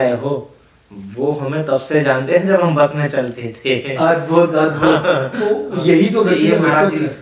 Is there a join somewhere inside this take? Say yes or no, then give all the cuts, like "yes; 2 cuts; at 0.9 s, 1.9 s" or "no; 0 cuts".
no; 0 cuts